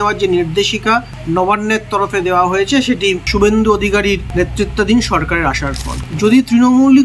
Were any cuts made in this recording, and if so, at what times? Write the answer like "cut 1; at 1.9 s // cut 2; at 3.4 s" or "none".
cut 1; at 3.3 s // cut 2; at 4.2 s // cut 3; at 6.0 s